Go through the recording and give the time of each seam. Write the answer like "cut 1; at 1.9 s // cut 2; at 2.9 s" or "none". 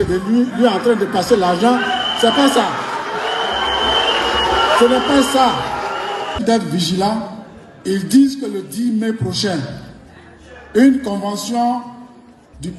cut 1; at 6.4 s